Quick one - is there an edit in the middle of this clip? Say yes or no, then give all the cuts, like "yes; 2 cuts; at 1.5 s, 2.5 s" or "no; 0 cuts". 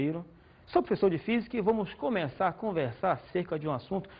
yes; 1 cut; at 2.4 s